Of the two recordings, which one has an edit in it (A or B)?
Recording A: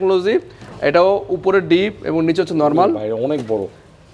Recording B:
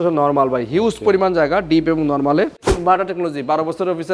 B